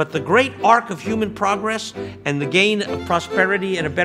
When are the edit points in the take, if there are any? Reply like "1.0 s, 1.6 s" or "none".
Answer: none